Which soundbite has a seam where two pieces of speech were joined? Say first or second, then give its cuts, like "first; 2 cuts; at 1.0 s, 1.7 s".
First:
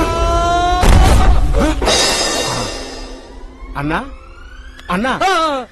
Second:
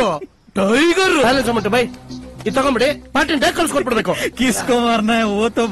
second; 1 cut; at 1.2 s